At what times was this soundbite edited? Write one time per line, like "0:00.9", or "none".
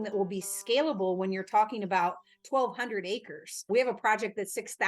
0:03.7